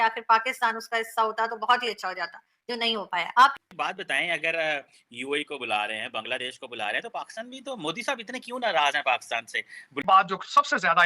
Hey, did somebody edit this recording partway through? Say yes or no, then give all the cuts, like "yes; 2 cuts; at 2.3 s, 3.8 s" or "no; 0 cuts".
yes; 2 cuts; at 3.5 s, 10.0 s